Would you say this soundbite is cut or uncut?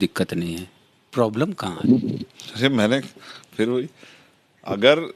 uncut